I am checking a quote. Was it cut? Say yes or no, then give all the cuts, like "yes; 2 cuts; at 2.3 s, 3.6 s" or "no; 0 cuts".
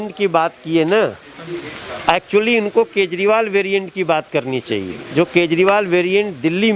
no; 0 cuts